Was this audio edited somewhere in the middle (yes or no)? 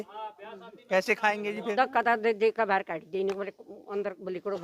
yes